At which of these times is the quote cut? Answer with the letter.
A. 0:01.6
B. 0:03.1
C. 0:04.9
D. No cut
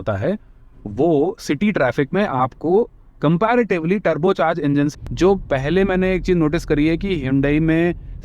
C